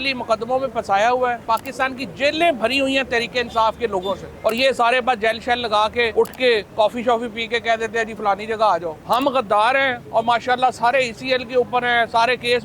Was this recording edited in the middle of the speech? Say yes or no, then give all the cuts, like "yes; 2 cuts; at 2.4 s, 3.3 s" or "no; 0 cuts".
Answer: yes; 4 cuts; at 1.5 s, 4.3 s, 6.1 s, 8.9 s